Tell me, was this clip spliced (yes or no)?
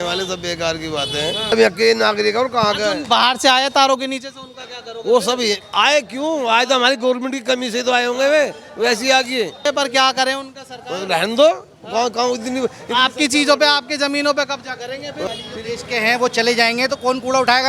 yes